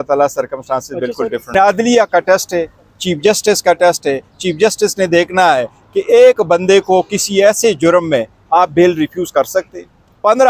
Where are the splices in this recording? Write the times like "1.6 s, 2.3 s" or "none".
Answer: 1.5 s